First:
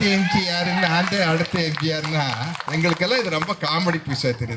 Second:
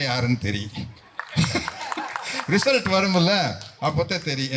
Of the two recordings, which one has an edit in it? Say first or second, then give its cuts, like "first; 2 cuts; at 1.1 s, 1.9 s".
first; 1 cut; at 2.6 s